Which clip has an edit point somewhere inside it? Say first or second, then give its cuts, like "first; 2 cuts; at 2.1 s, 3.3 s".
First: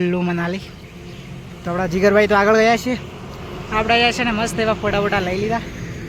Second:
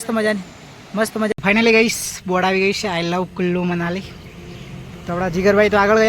second; 1 cut; at 1.3 s